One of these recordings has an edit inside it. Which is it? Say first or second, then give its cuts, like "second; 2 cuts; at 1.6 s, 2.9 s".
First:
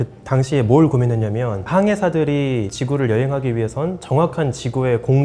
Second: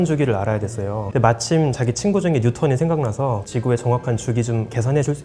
second; 2 cuts; at 1.0 s, 3.4 s